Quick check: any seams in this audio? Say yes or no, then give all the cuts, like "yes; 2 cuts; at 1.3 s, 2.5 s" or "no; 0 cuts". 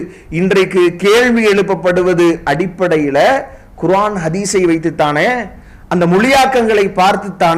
no; 0 cuts